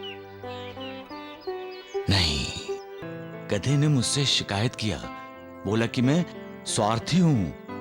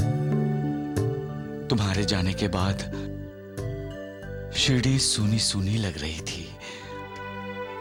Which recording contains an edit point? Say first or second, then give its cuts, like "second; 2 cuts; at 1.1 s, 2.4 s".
first; 1 cut; at 3.0 s